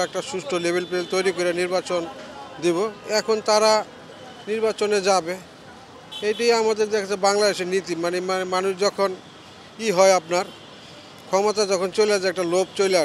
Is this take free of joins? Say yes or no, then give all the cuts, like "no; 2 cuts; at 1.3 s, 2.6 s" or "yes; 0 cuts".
yes; 0 cuts